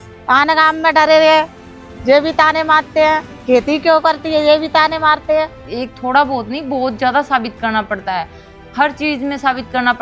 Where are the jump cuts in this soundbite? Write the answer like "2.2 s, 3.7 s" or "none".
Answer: 5.6 s